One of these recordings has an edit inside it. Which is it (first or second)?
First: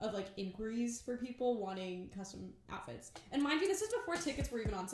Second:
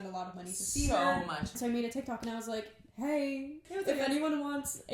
second